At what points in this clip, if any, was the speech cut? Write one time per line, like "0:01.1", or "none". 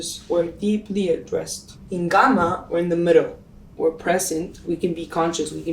0:02.6